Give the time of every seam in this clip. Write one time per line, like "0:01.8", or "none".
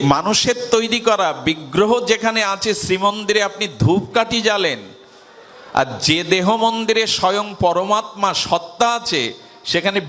none